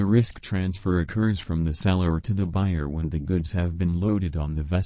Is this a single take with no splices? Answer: yes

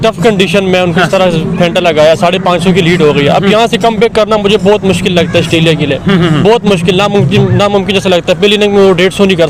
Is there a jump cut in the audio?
no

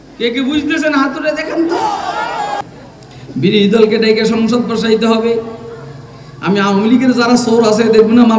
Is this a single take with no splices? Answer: no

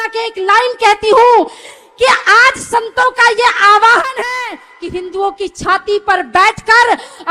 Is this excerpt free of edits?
yes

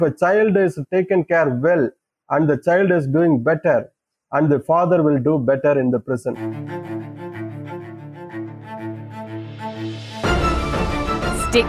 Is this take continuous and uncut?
no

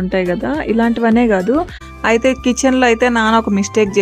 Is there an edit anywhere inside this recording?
yes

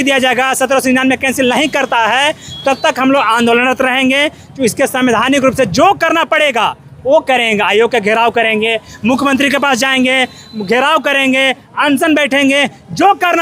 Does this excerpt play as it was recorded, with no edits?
yes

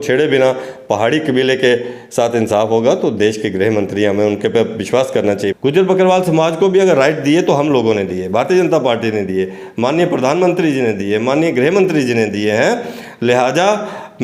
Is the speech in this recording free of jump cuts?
no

